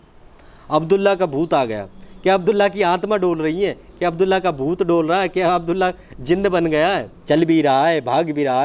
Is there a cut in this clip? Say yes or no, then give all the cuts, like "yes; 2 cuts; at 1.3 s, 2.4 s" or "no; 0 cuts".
yes; 1 cut; at 7.1 s